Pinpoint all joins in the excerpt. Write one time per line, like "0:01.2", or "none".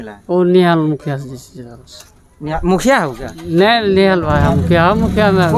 none